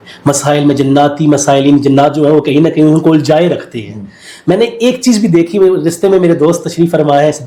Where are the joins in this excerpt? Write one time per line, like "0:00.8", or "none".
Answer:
none